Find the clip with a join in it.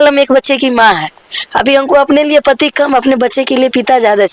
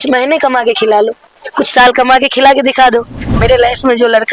second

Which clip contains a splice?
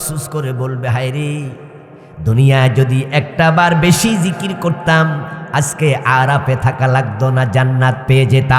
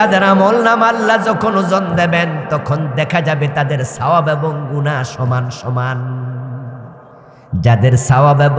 second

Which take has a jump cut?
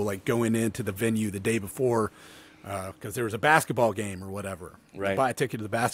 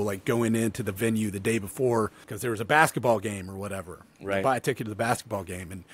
second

